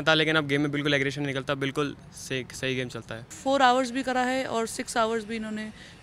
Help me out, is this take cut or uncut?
cut